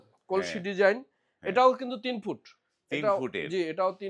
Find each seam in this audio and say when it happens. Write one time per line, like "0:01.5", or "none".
none